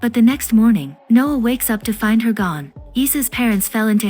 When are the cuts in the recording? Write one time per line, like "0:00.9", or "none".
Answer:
0:02.7